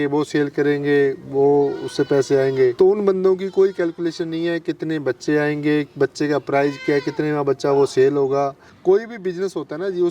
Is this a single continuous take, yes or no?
no